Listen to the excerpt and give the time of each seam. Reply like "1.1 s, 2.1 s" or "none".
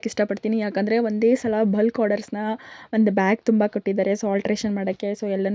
none